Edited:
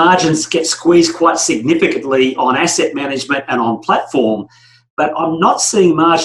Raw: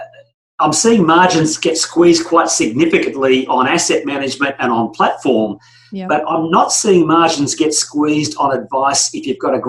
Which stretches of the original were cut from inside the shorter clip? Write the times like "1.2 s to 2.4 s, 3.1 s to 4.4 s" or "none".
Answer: none